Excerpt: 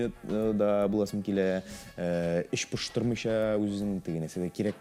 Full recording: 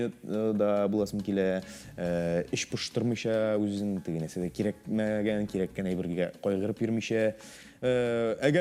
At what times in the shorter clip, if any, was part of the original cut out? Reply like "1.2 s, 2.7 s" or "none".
none